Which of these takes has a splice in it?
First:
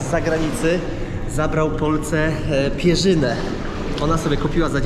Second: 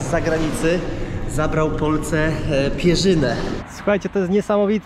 second; 1 cut; at 3.6 s

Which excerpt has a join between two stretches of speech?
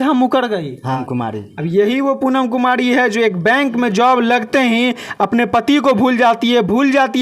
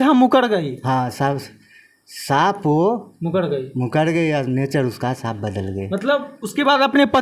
first; 1 cut; at 1.0 s

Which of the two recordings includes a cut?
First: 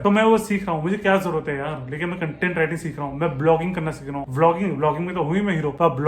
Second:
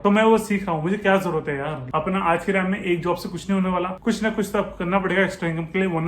second; 2 cuts; at 1.8 s, 3.9 s

